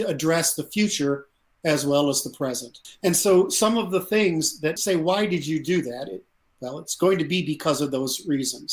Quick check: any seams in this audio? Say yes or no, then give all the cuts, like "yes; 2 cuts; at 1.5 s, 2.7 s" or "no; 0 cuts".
yes; 1 cut; at 2.8 s